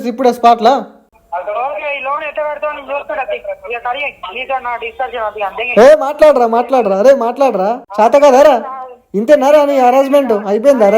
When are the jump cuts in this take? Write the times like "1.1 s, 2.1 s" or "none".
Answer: 1.1 s, 7.8 s